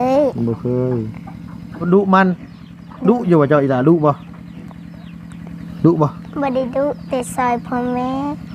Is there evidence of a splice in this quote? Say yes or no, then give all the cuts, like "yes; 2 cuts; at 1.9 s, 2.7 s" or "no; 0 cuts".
yes; 1 cut; at 1.8 s